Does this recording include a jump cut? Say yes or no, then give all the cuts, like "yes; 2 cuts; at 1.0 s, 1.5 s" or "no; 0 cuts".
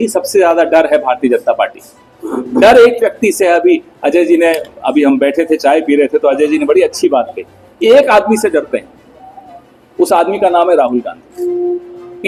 no; 0 cuts